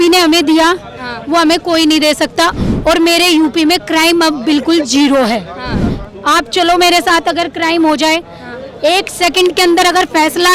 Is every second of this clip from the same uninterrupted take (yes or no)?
yes